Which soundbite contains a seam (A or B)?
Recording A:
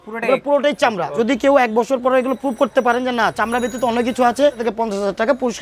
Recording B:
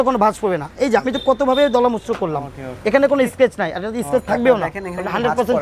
A